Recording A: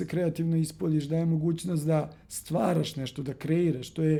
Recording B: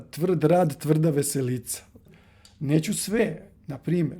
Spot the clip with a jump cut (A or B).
B